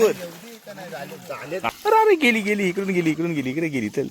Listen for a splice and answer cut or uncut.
cut